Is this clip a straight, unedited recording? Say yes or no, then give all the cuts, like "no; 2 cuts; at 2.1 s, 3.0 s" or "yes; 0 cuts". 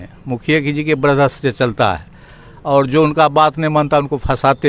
yes; 0 cuts